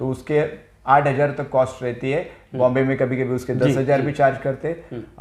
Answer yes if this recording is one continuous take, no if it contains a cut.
yes